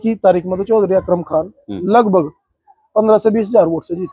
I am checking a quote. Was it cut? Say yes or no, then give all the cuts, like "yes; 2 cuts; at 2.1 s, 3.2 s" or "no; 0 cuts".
no; 0 cuts